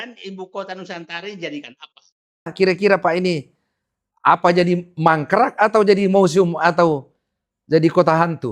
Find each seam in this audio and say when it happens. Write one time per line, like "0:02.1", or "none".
0:02.5